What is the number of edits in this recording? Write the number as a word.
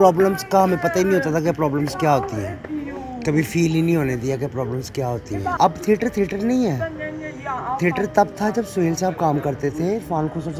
one